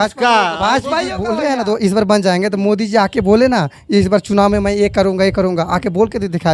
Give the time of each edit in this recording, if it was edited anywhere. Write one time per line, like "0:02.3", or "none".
0:01.2

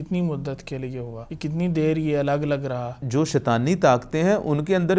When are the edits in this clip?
0:01.2
0:03.0

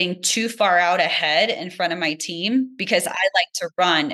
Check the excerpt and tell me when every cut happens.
0:02.8

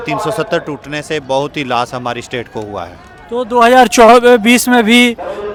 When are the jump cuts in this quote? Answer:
none

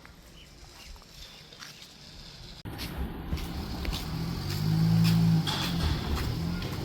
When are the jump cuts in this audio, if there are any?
0:02.6

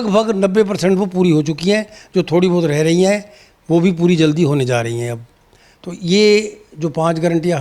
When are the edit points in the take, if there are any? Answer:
none

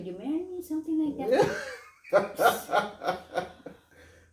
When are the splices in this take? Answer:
none

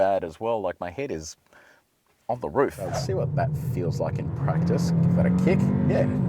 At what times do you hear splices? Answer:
0:03.0

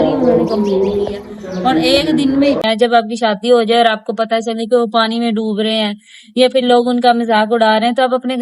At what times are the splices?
0:02.6

